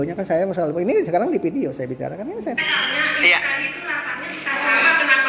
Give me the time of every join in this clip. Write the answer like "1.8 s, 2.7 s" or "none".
2.6 s